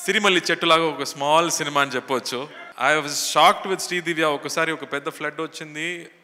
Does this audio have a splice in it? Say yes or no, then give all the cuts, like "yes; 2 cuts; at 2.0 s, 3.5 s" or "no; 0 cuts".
yes; 1 cut; at 2.6 s